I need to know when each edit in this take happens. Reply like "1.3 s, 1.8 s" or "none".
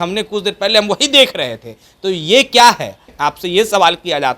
3.0 s